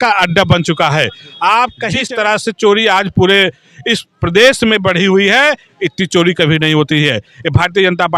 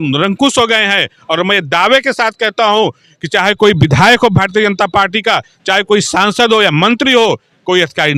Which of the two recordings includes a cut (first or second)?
first